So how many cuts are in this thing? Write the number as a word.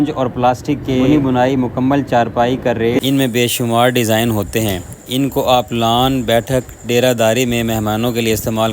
one